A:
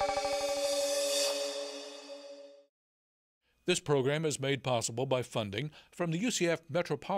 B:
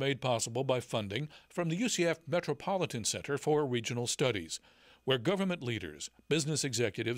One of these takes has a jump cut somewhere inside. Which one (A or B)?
A